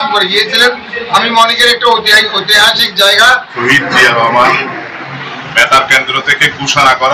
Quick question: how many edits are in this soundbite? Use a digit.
1